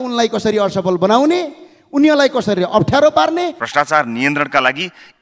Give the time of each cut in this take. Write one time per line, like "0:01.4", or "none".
0:03.6